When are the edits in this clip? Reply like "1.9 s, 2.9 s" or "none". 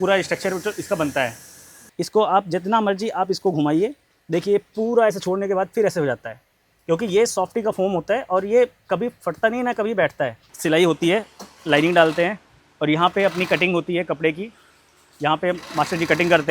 1.8 s, 10.4 s